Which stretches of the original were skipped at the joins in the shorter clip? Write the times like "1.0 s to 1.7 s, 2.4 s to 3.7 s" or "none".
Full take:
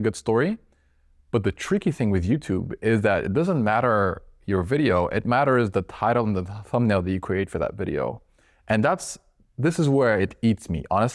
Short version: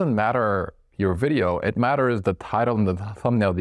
none